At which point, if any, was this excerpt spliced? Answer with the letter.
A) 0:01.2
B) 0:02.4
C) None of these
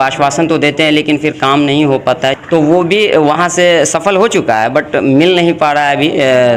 B